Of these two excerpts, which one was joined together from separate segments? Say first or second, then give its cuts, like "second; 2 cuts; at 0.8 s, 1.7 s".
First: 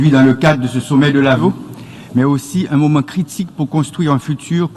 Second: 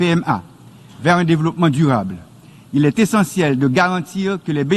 first; 1 cut; at 1.4 s